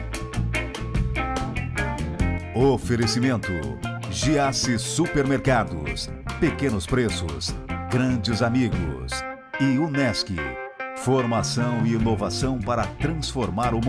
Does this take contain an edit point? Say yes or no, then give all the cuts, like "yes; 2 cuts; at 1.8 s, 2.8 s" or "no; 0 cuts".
no; 0 cuts